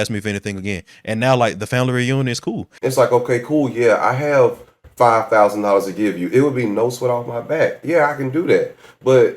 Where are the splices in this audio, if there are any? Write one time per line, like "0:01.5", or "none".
0:02.7